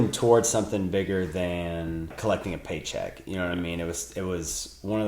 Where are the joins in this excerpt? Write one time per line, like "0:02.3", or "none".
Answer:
0:02.2